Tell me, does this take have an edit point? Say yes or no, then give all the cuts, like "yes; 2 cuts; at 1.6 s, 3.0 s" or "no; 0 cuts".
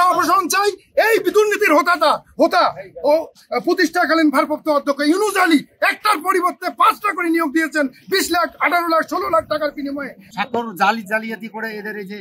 yes; 1 cut; at 10.2 s